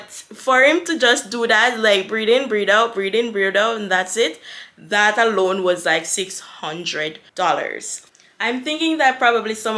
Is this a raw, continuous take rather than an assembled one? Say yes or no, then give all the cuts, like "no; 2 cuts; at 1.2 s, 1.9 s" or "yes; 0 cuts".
no; 2 cuts; at 7.2 s, 7.9 s